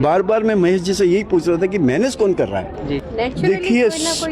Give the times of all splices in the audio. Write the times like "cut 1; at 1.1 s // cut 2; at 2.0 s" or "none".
cut 1; at 3.1 s